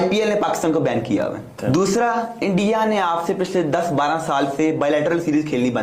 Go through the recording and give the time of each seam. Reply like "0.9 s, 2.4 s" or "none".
1.6 s